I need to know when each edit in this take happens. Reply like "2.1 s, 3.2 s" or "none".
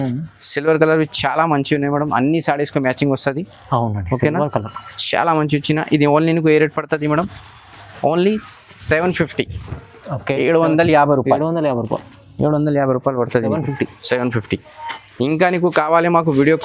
none